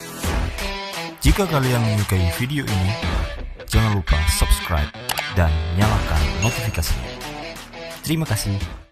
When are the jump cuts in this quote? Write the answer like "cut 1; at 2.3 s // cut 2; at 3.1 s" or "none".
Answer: none

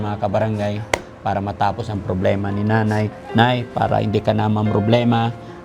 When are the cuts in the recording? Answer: none

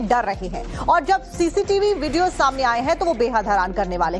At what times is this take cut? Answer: cut 1; at 2.3 s

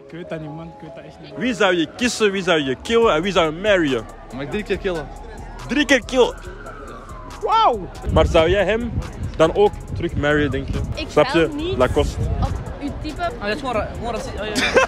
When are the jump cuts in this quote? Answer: cut 1; at 1.3 s // cut 2; at 4.3 s // cut 3; at 7.9 s

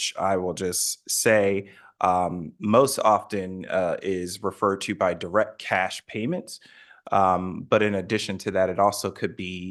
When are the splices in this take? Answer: none

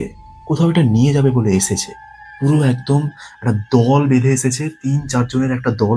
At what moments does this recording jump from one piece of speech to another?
none

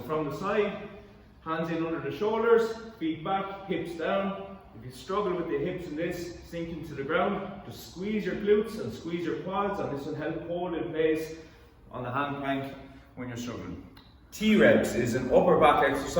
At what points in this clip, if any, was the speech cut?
cut 1; at 14.4 s

